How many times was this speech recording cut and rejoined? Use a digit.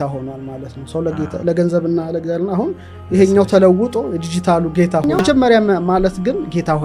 1